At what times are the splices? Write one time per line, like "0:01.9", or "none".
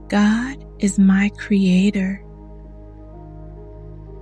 none